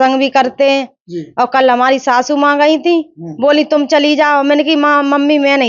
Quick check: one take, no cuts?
yes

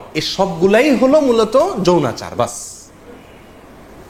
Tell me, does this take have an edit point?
no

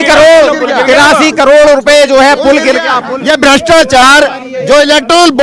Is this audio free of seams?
yes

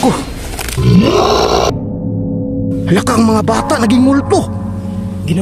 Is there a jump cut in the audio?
yes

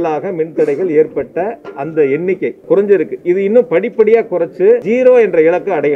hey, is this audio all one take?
no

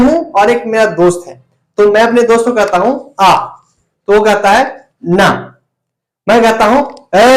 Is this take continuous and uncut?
yes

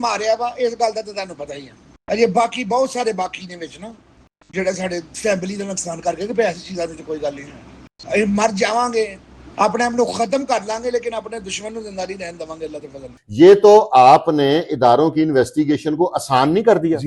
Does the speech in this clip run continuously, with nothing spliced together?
no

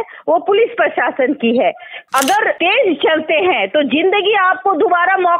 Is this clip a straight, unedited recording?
no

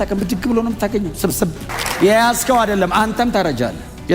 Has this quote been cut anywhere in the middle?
yes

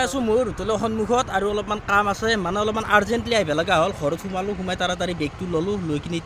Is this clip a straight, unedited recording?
yes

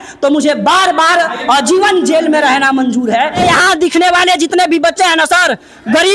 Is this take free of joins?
no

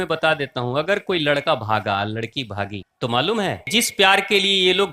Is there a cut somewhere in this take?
yes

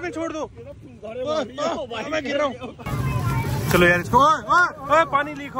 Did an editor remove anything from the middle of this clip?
yes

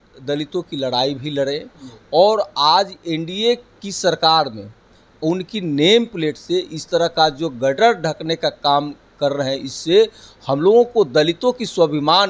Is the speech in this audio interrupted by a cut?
no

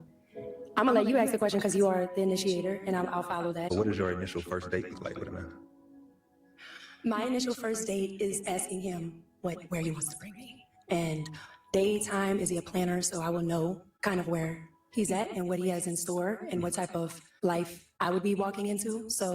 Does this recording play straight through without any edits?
no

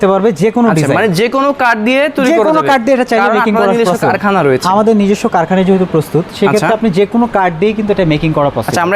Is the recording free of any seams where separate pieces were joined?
yes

